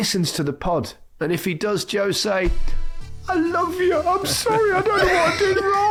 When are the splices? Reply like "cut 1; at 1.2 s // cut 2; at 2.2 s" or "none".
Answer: none